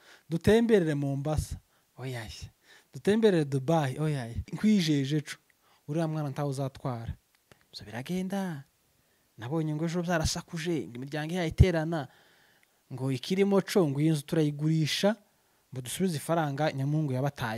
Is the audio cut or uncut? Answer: cut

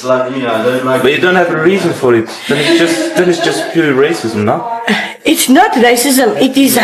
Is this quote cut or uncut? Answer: uncut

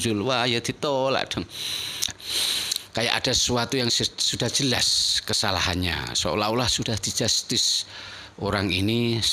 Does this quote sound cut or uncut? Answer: cut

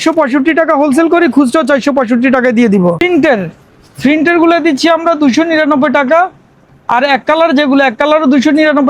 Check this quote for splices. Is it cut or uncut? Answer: cut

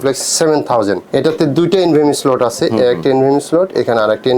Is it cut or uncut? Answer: cut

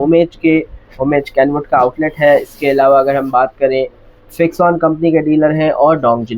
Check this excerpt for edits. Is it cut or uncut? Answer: uncut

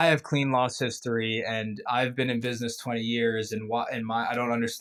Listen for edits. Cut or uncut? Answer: uncut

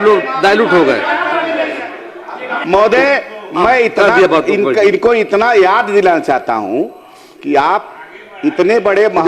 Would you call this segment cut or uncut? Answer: cut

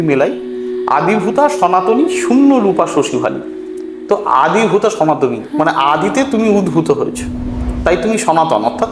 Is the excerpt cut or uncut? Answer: uncut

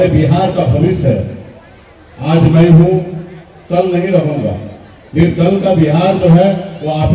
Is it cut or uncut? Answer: uncut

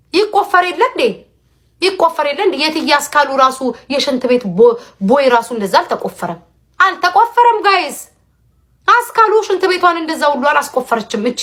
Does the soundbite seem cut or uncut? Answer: uncut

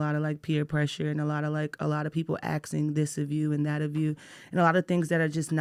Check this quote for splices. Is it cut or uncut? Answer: uncut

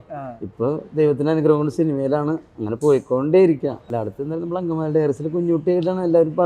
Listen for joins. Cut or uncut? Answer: cut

